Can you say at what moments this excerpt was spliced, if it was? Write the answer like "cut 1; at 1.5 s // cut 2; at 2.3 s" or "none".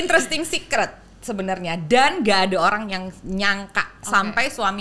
none